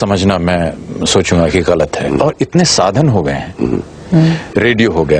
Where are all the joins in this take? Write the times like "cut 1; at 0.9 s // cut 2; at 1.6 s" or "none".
cut 1; at 2.1 s